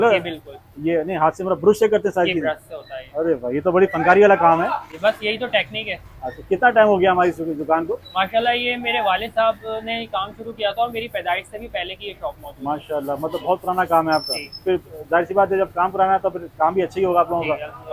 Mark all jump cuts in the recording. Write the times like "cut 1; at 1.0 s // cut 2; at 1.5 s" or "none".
none